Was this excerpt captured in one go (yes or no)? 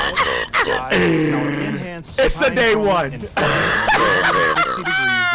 yes